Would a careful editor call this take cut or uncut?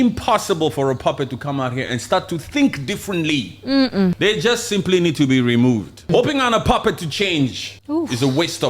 cut